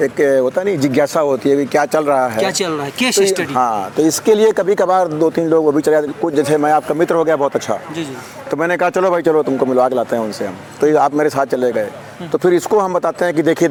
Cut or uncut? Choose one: uncut